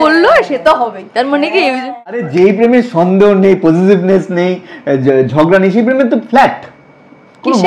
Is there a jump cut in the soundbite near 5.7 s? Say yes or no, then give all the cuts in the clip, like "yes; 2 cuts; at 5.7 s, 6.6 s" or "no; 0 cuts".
no; 1 cut; at 2.3 s